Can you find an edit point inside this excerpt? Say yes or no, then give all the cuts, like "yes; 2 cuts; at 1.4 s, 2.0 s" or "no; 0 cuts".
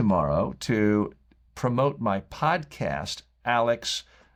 no; 0 cuts